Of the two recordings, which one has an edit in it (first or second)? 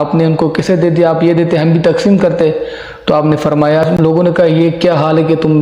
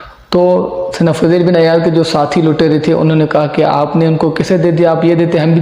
first